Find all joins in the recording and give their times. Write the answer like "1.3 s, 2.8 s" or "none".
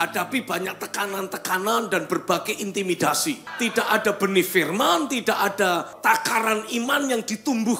3.5 s, 5.9 s